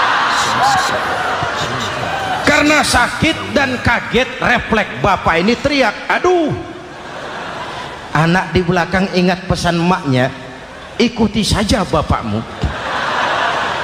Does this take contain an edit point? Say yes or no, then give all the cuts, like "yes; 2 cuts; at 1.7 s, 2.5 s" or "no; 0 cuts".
no; 0 cuts